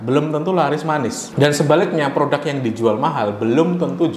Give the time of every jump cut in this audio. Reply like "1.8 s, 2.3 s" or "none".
1.2 s